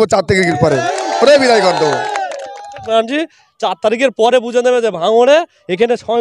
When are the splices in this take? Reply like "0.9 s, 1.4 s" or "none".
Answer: 2.9 s

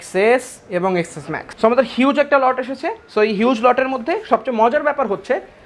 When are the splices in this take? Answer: 1.5 s

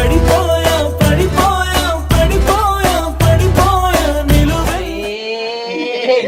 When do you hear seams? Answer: none

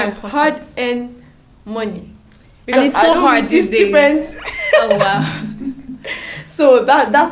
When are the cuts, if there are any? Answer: none

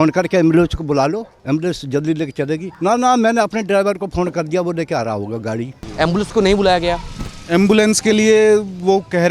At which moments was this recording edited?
5.8 s

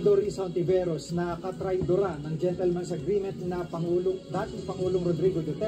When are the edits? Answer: none

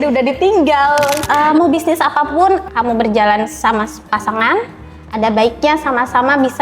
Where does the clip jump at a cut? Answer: 1.2 s, 2.7 s

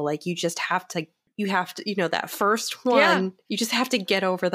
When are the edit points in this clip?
1.2 s

